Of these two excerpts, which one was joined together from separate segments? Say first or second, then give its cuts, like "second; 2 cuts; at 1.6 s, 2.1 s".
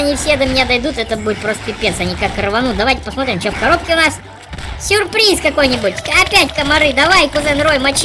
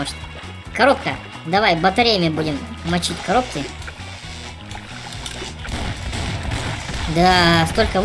second; 1 cut; at 7.1 s